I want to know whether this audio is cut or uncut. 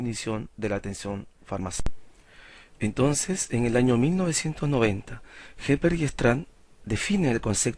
cut